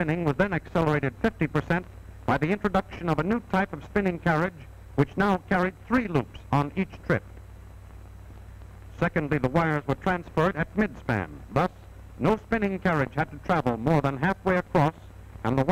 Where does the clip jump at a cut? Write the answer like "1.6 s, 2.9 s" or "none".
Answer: 4.7 s